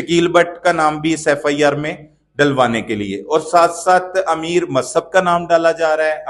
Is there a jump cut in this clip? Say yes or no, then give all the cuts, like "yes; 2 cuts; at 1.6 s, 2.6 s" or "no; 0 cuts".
no; 0 cuts